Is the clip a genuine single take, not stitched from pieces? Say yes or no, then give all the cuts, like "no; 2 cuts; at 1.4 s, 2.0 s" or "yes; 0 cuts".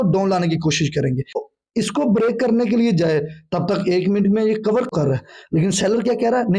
no; 2 cuts; at 1.5 s, 4.9 s